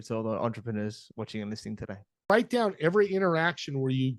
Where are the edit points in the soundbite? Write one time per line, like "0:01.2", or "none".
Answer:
0:02.3